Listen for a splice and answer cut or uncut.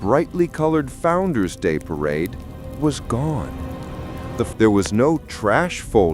cut